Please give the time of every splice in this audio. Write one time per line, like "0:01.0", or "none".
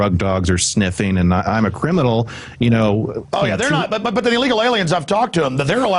0:03.7